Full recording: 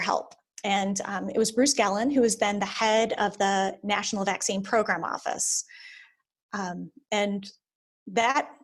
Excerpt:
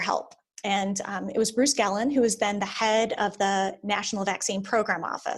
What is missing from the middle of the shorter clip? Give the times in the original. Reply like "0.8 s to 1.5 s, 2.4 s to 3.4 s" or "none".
none